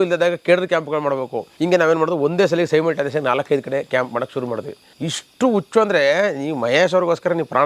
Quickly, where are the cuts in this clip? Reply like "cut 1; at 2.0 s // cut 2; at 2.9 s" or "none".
cut 1; at 1.4 s // cut 2; at 4.8 s